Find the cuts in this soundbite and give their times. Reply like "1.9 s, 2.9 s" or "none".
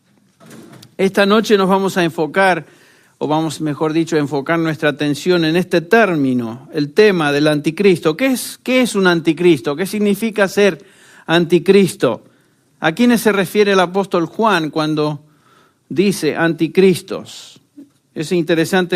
14.2 s

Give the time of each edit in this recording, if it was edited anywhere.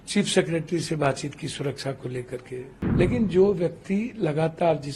2.8 s

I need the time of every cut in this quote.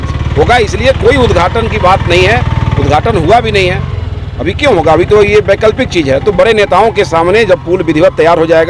none

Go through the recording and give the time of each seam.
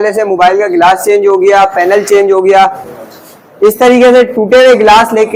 none

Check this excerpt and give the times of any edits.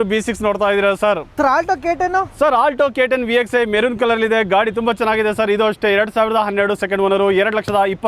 1.3 s

